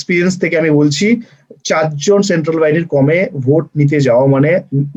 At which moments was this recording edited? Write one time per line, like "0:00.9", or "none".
none